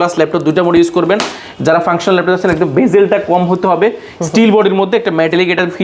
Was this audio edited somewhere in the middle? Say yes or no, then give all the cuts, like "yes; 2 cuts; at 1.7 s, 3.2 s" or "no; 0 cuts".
no; 0 cuts